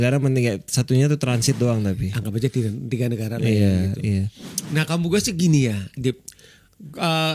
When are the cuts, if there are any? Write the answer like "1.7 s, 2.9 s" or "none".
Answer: none

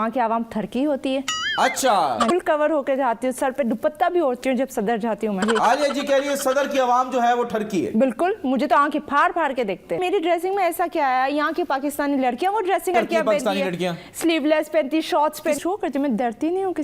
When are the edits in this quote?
2.3 s, 5.4 s, 10.0 s, 12.9 s, 15.6 s

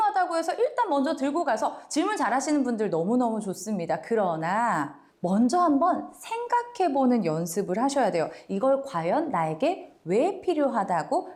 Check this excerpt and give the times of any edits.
none

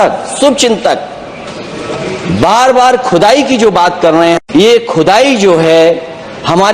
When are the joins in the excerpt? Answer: 4.3 s

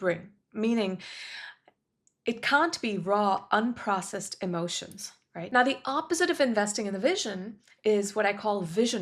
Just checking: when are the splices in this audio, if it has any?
5.5 s

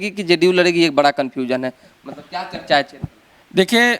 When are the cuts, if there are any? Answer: none

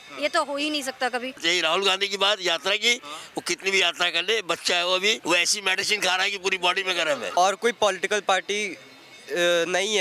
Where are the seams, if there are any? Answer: 1.4 s, 5.2 s, 7.4 s

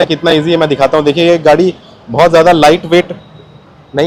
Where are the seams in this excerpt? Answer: none

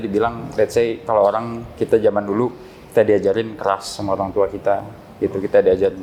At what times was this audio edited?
none

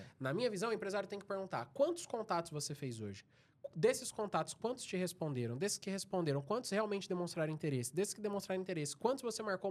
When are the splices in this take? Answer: none

